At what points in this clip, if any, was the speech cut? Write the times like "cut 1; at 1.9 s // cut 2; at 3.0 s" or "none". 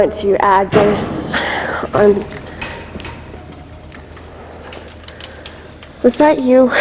none